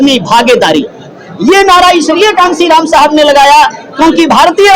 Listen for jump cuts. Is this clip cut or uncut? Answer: uncut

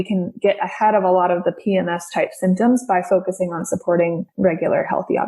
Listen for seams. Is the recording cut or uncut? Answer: cut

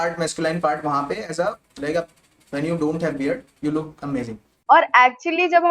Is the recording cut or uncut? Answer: cut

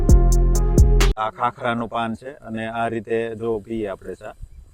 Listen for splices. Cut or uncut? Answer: cut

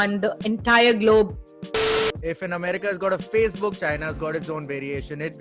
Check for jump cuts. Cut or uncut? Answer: cut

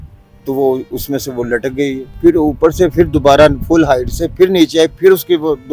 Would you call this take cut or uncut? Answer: cut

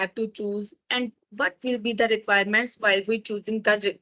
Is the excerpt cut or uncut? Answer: uncut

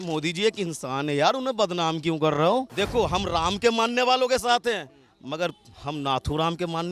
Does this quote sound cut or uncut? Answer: cut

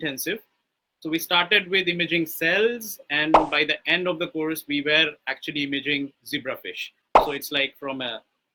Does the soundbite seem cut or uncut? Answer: uncut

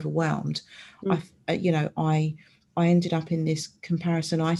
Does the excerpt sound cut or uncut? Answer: uncut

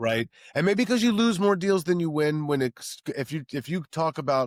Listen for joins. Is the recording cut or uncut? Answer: uncut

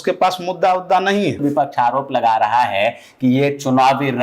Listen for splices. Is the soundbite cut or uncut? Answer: cut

